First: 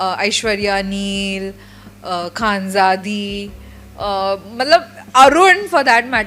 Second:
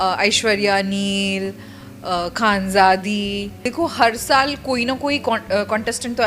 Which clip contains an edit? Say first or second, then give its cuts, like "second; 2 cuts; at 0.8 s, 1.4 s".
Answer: second; 1 cut; at 3.6 s